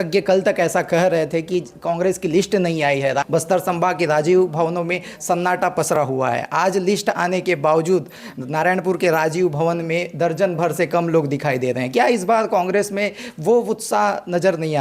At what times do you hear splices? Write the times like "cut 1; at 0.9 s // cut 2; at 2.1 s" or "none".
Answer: none